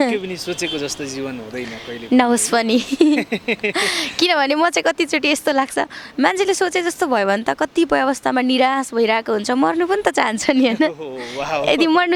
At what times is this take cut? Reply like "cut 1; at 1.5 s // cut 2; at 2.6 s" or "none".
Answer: none

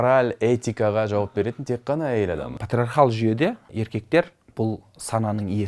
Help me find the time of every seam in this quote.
cut 1; at 2.5 s // cut 2; at 3.7 s

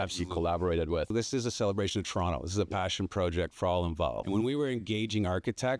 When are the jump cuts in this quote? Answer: cut 1; at 1.1 s // cut 2; at 4.2 s

